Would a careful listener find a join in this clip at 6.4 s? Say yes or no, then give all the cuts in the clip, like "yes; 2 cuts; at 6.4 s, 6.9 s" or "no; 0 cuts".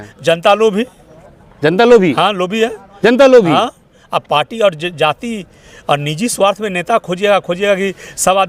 no; 0 cuts